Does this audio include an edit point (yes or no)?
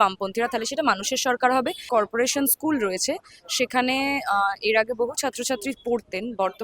yes